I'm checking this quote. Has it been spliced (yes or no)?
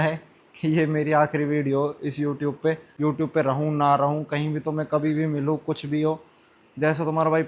yes